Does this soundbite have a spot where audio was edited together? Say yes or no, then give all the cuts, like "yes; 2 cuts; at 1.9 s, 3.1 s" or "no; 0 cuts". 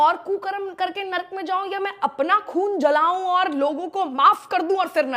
no; 0 cuts